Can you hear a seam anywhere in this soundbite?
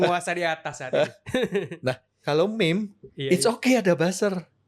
no; 0 cuts

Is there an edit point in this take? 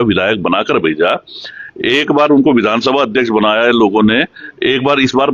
no; 0 cuts

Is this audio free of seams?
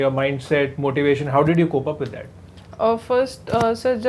yes; 0 cuts

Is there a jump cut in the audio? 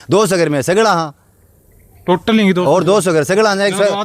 no; 0 cuts

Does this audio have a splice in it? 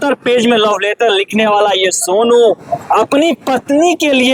no; 0 cuts

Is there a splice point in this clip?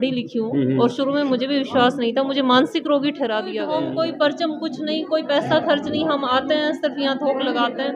yes; 1 cut; at 3.6 s

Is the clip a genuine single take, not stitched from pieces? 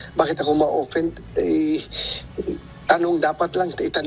no; 1 cut; at 2.7 s

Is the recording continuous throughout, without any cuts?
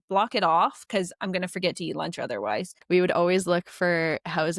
no; 1 cut; at 2.8 s

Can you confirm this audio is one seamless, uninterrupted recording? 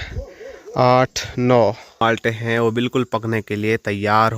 no; 1 cut; at 2.0 s

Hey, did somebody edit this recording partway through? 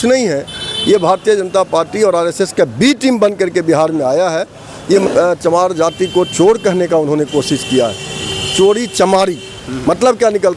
yes; 1 cut; at 5.1 s

